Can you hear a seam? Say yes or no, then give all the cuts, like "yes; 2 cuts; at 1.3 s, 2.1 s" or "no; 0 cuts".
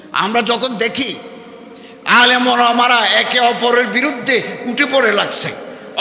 no; 0 cuts